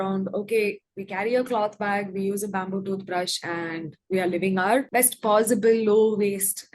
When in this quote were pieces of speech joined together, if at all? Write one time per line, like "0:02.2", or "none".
0:04.9